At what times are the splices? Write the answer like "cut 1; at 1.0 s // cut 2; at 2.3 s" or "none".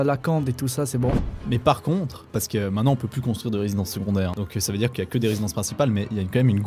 cut 1; at 1.3 s // cut 2; at 2.3 s // cut 3; at 4.3 s